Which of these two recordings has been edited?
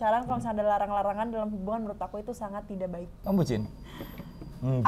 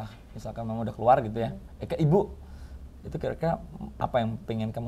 first; 1 cut; at 3.1 s

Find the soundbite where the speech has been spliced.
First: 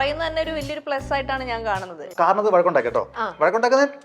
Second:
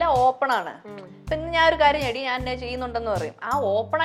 first; 1 cut; at 2.1 s

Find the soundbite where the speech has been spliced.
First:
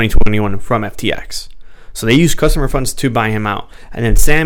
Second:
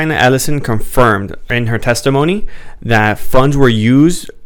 second; 1 cut; at 1.4 s

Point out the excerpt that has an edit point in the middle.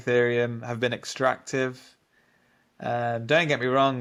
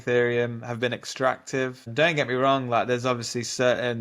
second; 1 cut; at 1.9 s

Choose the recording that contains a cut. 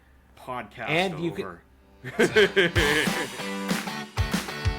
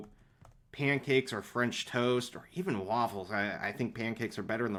first; 1 cut; at 3.0 s

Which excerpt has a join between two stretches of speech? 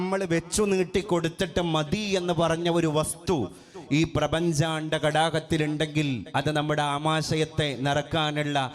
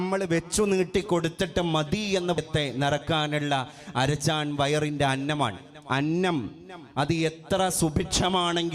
second; 1 cut; at 2.4 s

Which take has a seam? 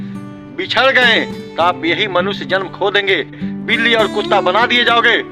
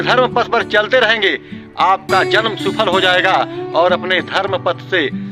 first; 2 cuts; at 1.4 s, 3.4 s

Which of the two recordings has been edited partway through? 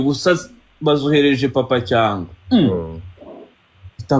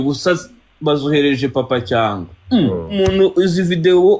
second; 1 cut; at 3.0 s

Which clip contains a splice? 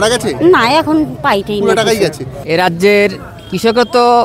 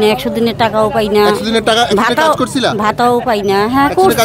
first; 1 cut; at 2.3 s

